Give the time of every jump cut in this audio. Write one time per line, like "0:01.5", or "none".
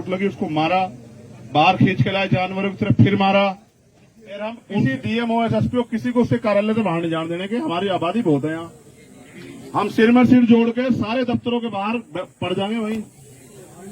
0:04.6